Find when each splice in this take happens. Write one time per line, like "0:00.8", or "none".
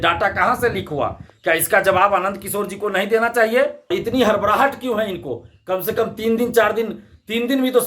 0:03.9